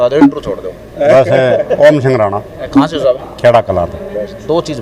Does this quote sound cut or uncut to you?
uncut